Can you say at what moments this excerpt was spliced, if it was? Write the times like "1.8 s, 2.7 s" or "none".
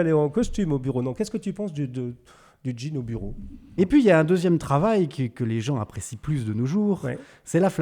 3.8 s